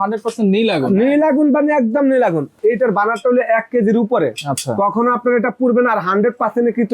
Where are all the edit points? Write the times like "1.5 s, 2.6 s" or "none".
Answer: 2.5 s